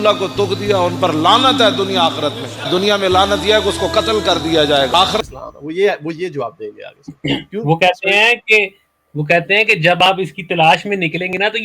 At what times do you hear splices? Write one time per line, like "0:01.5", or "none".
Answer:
0:05.2